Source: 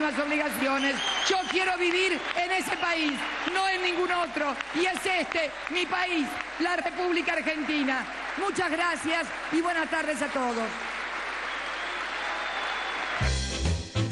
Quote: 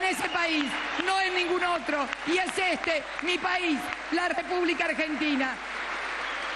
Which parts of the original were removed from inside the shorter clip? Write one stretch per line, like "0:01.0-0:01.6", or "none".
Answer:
0:08.1-0:10.9